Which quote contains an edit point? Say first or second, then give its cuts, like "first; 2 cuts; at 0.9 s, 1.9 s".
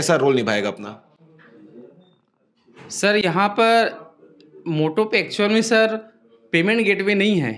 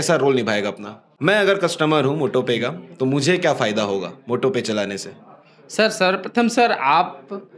second; 1 cut; at 1.0 s